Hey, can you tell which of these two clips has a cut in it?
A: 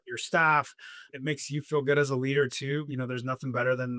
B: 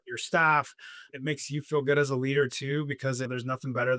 A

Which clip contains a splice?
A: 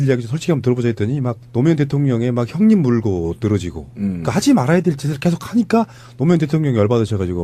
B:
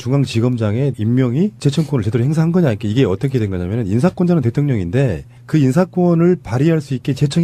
A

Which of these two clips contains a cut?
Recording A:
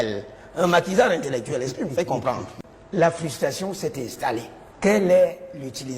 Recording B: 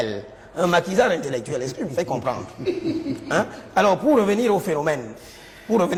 A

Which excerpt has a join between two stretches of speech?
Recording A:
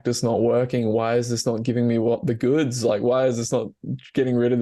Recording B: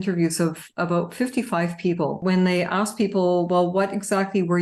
B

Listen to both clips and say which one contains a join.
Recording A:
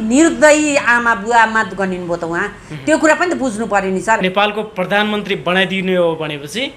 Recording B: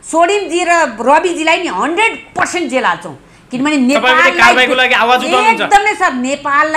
A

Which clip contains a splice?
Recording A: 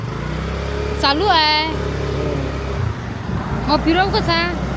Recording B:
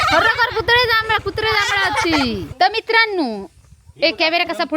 B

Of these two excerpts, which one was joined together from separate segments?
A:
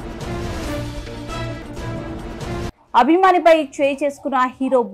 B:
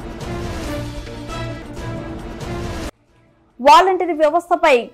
B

